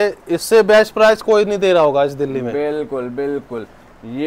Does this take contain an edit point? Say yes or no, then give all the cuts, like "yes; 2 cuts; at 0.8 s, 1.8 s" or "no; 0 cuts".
no; 0 cuts